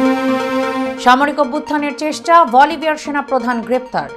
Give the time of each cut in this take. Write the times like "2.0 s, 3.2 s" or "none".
0.9 s